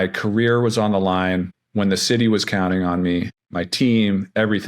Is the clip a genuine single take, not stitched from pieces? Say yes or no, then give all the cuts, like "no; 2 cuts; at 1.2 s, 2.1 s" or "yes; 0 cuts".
no; 2 cuts; at 1.6 s, 3.4 s